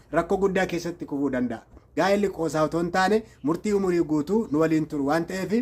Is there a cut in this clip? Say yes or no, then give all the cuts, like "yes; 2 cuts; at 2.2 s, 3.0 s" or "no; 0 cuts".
yes; 1 cut; at 2.1 s